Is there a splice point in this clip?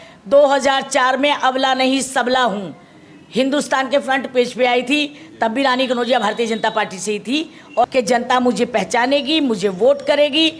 yes; 1 cut; at 7.9 s

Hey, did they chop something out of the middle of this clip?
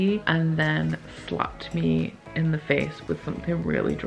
no; 0 cuts

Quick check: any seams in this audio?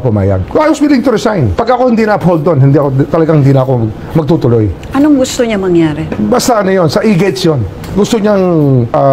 no; 0 cuts

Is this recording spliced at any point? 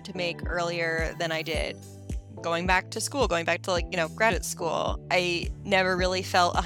no; 0 cuts

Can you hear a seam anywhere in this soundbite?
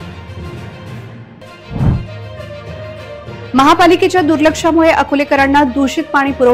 yes; 1 cut; at 1.0 s

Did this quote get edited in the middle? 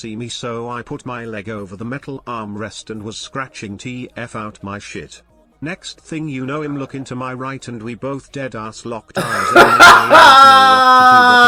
no; 0 cuts

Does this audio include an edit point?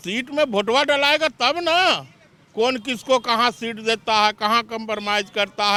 no; 0 cuts

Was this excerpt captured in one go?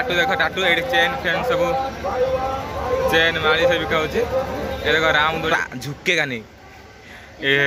no; 1 cut; at 5.5 s

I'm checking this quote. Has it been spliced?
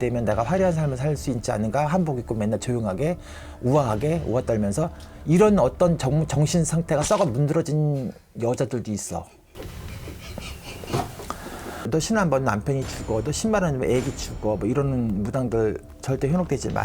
yes; 2 cuts; at 11.8 s, 15.9 s

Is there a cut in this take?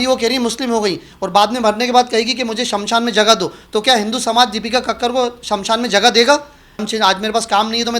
yes; 1 cut; at 6.8 s

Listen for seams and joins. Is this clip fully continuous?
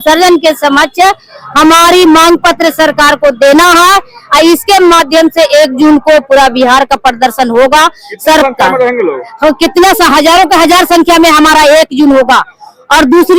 yes; 0 cuts

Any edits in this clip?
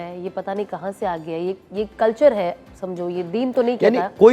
no; 0 cuts

